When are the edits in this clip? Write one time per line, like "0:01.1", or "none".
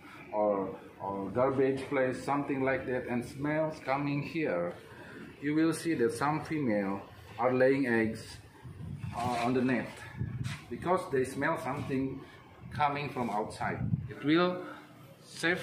0:14.1

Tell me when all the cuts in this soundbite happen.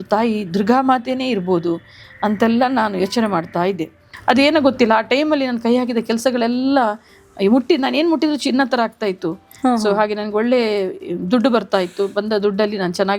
0:04.1

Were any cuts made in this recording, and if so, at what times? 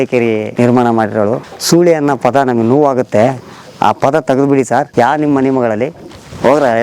0:01.5
0:04.9

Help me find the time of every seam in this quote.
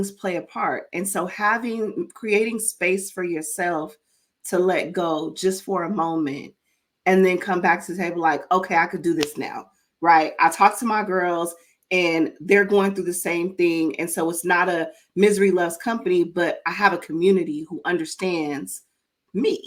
none

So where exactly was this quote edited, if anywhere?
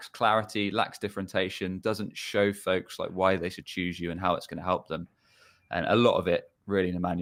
none

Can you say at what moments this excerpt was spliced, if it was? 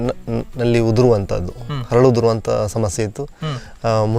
none

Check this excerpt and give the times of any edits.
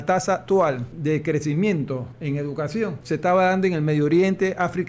0:00.9
0:02.1
0:03.0

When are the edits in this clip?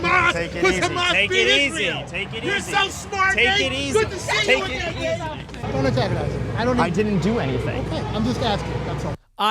0:05.6

